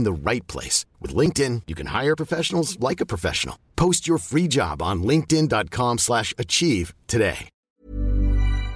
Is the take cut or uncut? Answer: cut